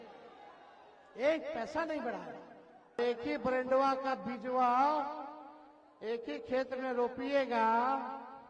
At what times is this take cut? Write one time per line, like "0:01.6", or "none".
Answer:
0:03.0